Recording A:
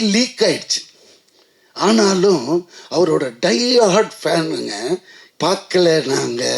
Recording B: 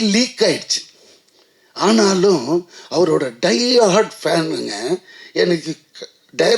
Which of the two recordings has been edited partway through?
A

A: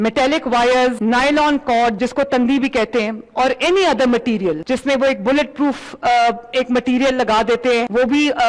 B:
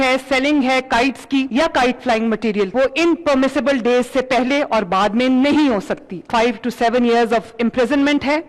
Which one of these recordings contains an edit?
B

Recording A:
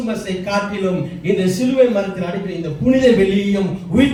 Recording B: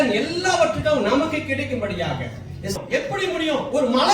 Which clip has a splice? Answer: B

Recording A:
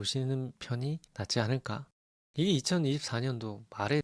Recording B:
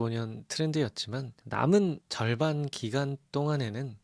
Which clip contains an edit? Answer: A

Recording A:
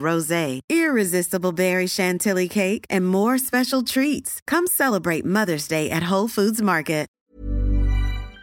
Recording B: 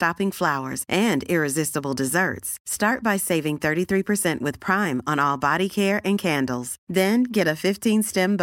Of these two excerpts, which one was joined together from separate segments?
A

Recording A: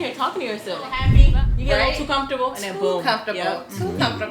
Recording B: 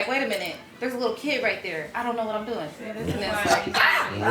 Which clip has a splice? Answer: A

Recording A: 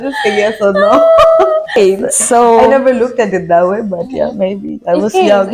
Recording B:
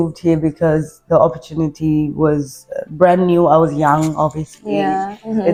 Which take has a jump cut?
A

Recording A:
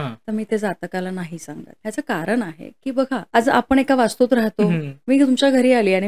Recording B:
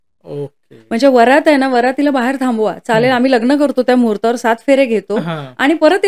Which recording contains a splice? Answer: A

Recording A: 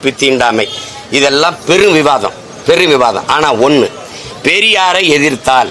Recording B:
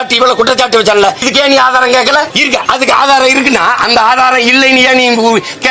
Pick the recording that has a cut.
B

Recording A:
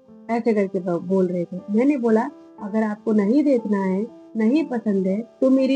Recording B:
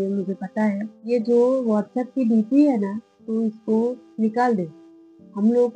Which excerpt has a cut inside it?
B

